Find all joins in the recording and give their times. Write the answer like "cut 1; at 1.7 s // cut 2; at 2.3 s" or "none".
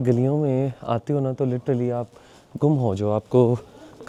none